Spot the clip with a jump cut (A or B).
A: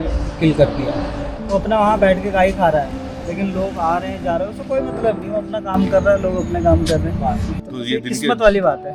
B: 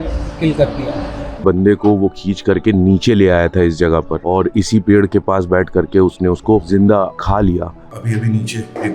B